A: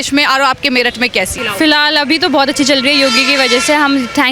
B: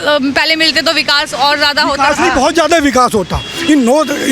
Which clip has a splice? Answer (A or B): A